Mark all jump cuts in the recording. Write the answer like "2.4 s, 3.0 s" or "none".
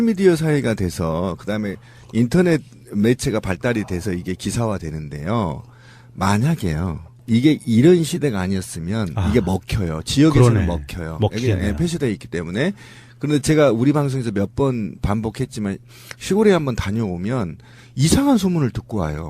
4.2 s